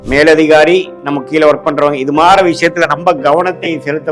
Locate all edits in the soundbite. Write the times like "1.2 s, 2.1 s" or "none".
1.0 s